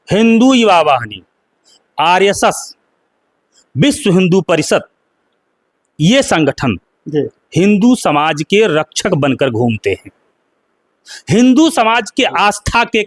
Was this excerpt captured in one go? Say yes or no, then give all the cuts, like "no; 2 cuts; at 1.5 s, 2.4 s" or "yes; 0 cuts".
yes; 0 cuts